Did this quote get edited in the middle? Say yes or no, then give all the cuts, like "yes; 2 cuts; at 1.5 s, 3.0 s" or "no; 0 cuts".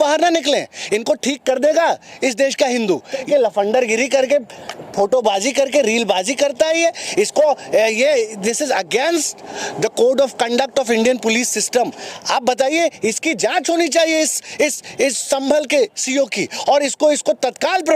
yes; 2 cuts; at 3.3 s, 12.1 s